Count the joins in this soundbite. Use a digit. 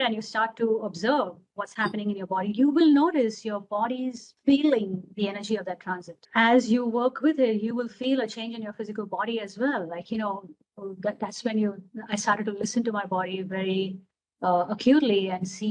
2